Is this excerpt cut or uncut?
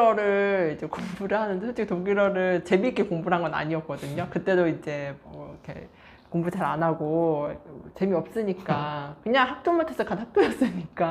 uncut